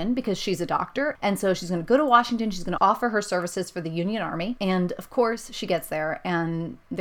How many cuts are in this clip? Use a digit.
2